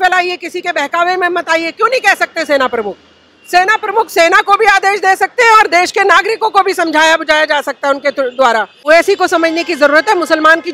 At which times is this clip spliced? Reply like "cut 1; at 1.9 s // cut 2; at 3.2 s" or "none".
cut 1; at 8.8 s